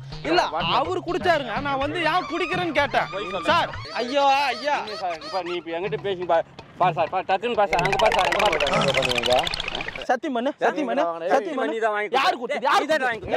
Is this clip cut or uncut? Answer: cut